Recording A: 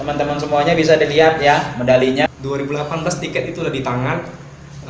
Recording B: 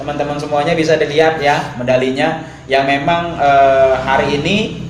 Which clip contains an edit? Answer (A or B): A